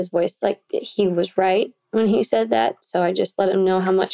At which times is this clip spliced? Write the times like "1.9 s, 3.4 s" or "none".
none